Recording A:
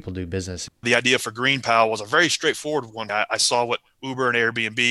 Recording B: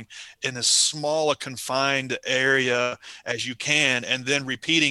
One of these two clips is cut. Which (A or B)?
A